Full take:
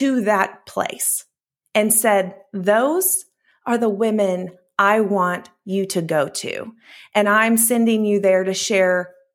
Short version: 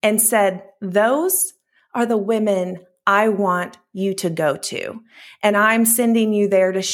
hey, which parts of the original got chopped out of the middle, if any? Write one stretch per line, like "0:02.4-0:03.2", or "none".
none